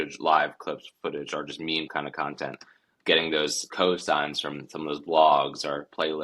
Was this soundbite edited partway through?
yes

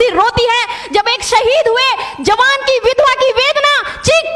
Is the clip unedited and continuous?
yes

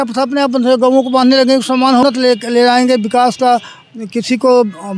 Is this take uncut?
no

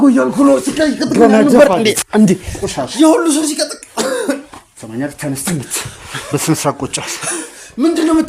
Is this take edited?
no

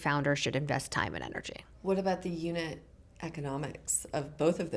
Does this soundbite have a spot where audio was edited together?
no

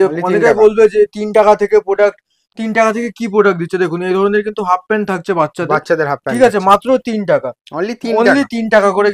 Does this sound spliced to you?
no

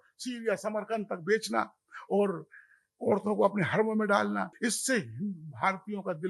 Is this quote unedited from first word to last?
no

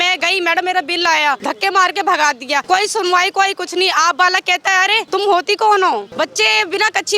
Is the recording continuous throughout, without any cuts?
no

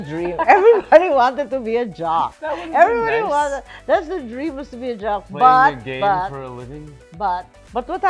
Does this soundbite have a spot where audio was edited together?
no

